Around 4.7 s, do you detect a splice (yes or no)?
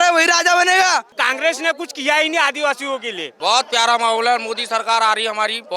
no